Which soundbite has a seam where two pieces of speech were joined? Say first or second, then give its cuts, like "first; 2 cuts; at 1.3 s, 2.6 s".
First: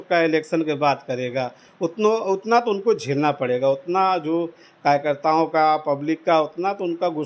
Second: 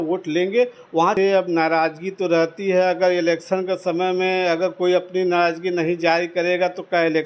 second; 1 cut; at 1.1 s